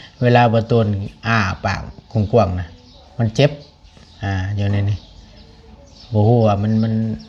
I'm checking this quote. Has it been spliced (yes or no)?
no